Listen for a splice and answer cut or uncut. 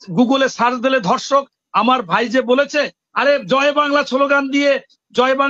uncut